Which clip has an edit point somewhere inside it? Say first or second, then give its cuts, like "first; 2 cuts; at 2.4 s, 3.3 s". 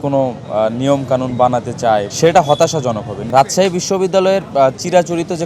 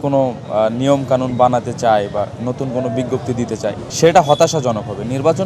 first; 2 cuts; at 2.1 s, 3.2 s